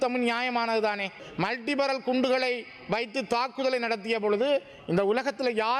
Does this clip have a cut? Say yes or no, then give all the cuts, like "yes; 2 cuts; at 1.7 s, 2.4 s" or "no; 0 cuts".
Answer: yes; 1 cut; at 1.2 s